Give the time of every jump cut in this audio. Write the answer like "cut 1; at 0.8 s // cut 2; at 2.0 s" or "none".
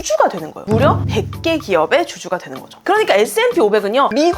cut 1; at 2.7 s